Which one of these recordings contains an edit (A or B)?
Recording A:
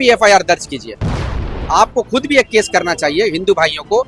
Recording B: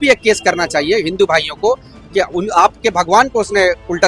A